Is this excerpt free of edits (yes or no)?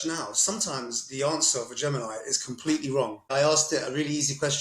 no